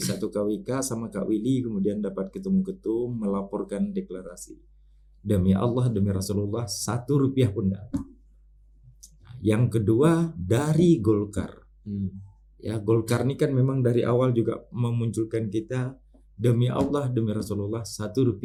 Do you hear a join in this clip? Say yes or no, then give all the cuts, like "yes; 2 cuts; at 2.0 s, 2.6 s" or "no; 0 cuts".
no; 0 cuts